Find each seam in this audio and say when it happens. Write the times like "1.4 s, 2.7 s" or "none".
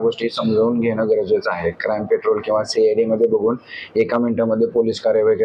none